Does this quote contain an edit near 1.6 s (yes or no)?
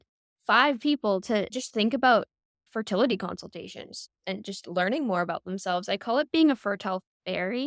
yes